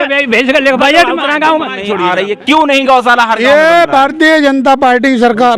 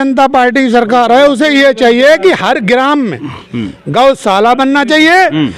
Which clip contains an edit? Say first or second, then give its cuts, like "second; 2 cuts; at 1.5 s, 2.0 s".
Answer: first; 1 cut; at 1.8 s